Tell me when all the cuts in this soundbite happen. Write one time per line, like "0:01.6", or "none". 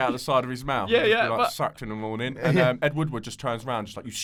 none

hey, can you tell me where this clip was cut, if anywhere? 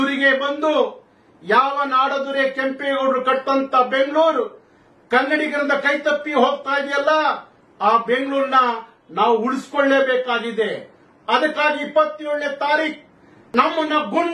0:13.3

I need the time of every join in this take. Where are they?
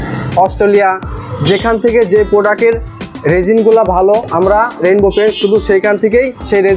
0:04.3

